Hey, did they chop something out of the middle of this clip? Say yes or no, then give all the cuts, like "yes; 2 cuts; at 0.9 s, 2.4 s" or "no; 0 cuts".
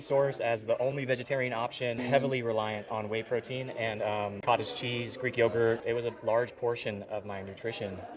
yes; 2 cuts; at 2.0 s, 5.8 s